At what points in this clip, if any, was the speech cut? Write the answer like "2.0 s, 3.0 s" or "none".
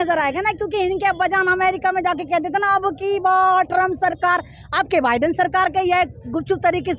none